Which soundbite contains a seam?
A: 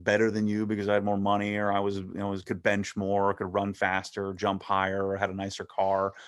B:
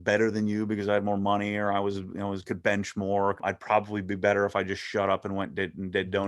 B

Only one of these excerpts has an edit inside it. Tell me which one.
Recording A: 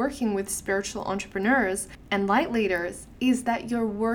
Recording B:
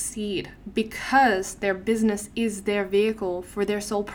A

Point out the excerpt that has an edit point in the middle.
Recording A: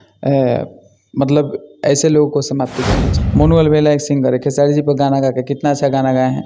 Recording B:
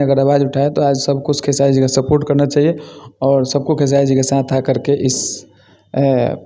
A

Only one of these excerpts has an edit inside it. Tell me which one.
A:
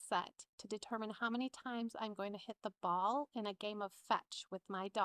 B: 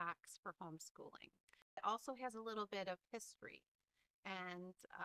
B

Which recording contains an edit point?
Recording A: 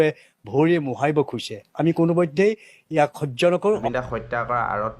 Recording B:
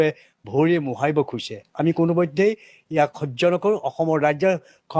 A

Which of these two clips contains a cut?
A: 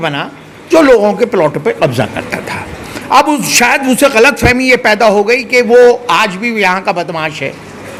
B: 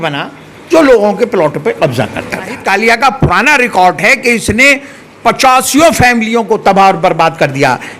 B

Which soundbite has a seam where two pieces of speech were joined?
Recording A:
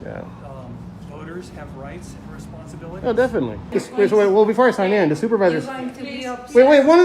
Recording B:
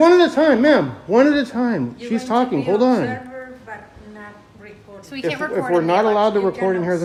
A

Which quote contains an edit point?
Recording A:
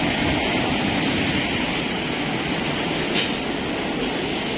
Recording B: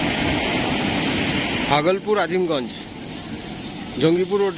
B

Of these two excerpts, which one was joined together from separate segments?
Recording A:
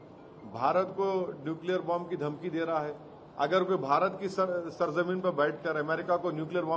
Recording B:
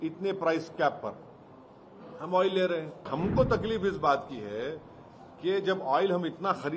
B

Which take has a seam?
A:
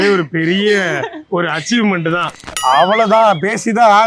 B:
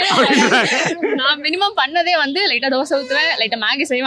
A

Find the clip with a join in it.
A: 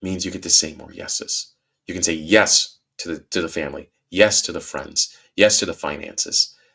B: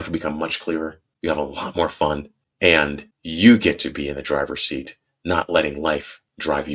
B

